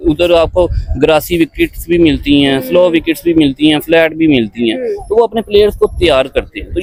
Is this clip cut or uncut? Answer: uncut